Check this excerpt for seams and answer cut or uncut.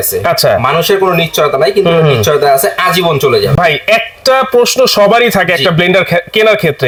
uncut